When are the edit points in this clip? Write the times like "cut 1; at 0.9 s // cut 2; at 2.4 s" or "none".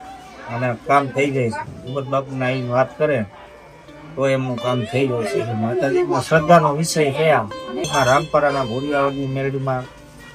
none